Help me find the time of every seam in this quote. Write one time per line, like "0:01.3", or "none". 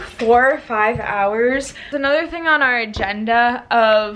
0:01.9